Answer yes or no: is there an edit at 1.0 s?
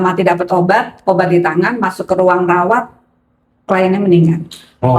no